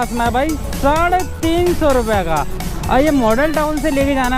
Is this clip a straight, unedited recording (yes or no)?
no